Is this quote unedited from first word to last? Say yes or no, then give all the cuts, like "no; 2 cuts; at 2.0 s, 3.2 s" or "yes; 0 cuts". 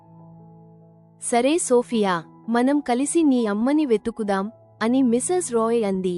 no; 1 cut; at 1.2 s